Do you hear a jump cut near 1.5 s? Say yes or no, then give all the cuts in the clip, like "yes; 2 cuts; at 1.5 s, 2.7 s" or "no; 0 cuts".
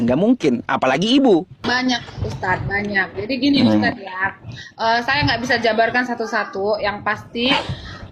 yes; 1 cut; at 1.5 s